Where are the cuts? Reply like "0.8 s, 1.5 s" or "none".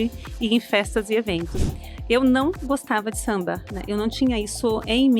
1.5 s